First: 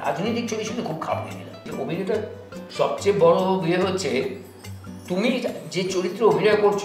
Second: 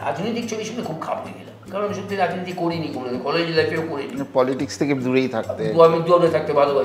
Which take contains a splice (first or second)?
first